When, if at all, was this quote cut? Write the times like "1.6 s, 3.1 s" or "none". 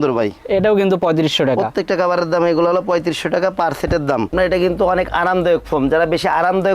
4.3 s